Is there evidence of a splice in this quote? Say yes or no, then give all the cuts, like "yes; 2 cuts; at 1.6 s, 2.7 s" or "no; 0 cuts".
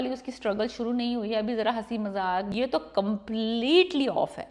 yes; 1 cut; at 2.5 s